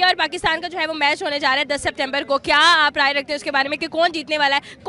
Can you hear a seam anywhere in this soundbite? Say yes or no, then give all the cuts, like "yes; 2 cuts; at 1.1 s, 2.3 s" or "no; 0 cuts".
no; 0 cuts